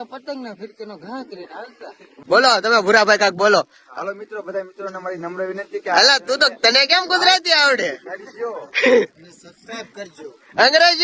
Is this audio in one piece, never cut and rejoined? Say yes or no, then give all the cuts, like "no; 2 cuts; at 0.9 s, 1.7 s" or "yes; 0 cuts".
no; 1 cut; at 2.1 s